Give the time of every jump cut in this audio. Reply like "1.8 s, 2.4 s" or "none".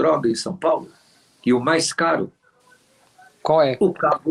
none